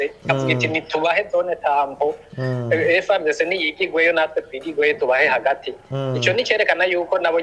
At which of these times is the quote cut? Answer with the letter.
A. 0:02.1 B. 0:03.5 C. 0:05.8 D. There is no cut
D